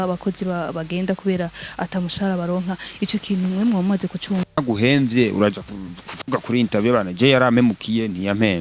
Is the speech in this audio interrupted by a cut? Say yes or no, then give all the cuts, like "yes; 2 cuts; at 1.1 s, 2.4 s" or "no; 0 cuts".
no; 0 cuts